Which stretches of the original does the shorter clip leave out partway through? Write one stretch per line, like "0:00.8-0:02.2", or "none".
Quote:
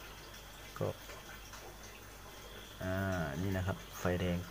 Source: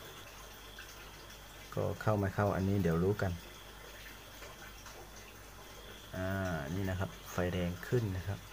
0:01.9-0:04.2

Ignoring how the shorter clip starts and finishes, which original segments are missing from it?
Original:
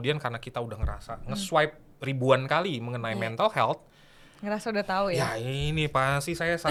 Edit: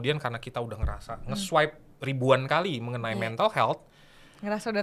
none

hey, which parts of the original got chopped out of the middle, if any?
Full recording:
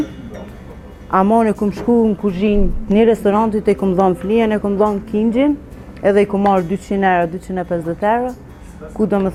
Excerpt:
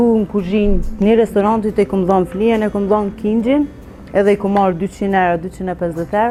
none

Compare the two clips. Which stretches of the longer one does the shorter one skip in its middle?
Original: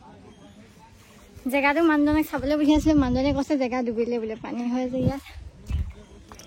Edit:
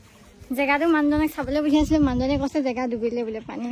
none

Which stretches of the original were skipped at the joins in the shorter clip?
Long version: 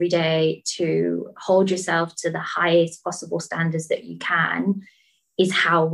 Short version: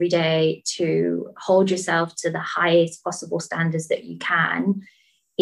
none

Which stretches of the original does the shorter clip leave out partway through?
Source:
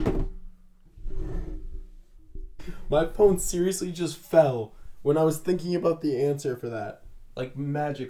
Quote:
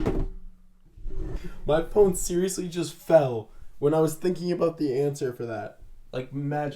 0:01.4-0:02.6

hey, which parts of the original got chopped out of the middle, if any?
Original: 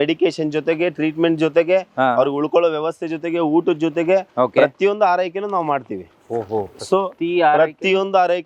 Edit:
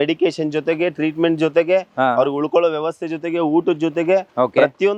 none

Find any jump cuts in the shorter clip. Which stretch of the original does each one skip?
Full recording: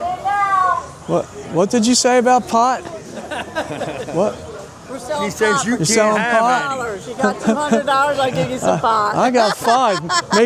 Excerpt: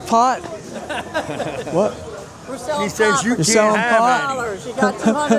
none

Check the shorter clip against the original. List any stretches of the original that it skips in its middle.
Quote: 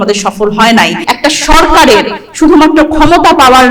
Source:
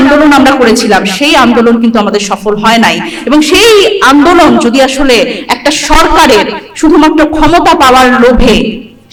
0:03.1-0:05.4

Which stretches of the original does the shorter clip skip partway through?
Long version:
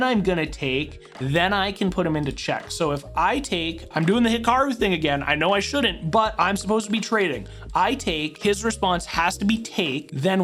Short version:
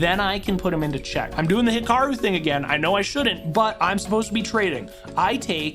0:02.6-0:03.9

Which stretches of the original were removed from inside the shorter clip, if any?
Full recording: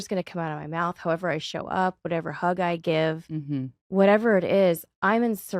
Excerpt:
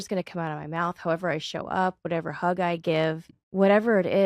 0:03.3-0:03.7

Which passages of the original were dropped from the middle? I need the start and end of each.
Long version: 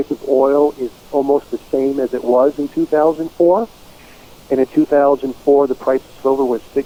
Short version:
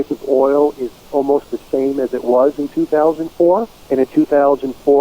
0:03.7-0:04.3

